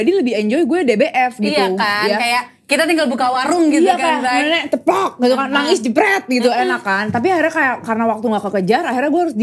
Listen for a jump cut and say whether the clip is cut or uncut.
uncut